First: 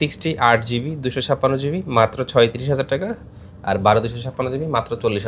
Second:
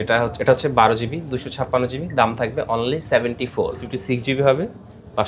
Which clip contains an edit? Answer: second; 1 cut; at 3.9 s

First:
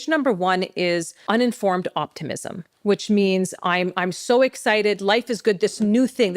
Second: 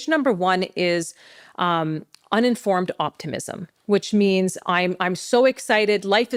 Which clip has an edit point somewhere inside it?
first; 1 cut; at 1.1 s

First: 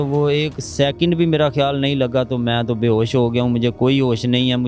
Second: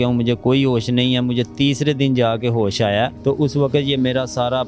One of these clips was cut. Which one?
second; 1 cut; at 3.1 s

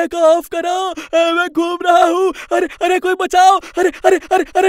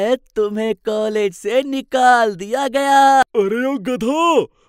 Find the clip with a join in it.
second; 1 cut; at 3.2 s

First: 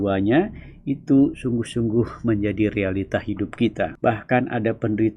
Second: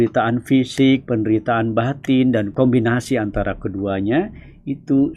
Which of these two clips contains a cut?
first; 1 cut; at 3.9 s

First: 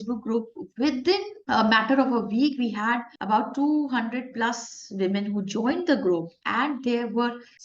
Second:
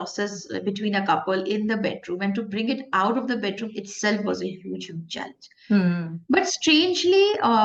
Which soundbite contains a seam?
first; 2 cuts; at 1.3 s, 3.1 s

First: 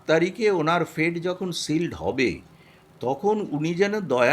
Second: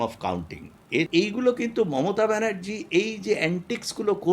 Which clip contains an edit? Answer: second; 1 cut; at 1.1 s

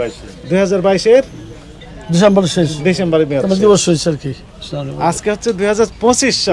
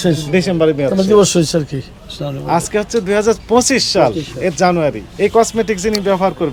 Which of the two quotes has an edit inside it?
second; 1 cut; at 5.1 s

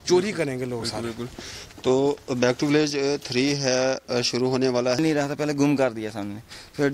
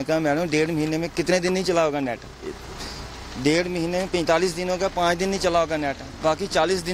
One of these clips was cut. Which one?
first; 1 cut; at 5.0 s

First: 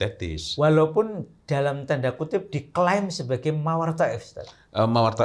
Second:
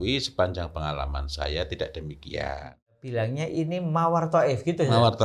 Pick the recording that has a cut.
second; 1 cut; at 3.0 s

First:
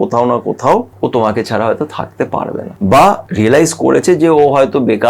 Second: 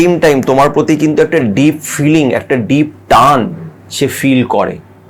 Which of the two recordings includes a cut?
first; 3 cuts; at 0.9 s, 2.7 s, 3.3 s

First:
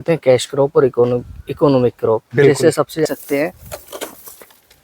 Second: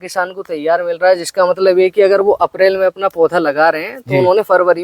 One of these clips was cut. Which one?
first; 1 cut; at 3.1 s

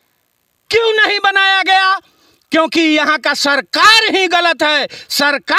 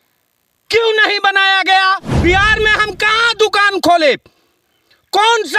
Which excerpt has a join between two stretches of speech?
second; 1 cut; at 2.1 s

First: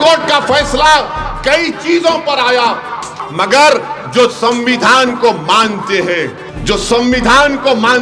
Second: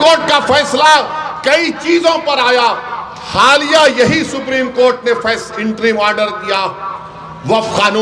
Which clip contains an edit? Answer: first; 2 cuts; at 3.2 s, 6.5 s

